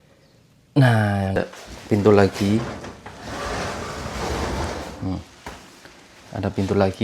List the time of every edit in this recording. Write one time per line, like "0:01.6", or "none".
0:01.4